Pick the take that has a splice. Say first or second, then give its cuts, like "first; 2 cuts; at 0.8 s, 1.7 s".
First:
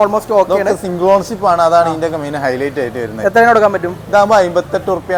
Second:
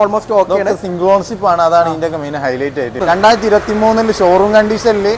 second; 1 cut; at 3.0 s